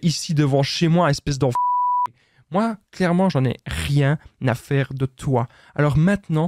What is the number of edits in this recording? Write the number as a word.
zero